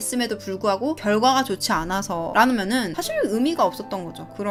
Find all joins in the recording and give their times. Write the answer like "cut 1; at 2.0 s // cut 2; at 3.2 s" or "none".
none